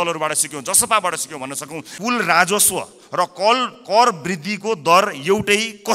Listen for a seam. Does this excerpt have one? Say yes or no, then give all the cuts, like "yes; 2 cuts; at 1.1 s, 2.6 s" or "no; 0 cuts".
yes; 1 cut; at 1.8 s